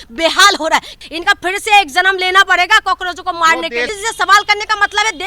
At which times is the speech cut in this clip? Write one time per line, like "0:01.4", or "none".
0:01.0
0:03.9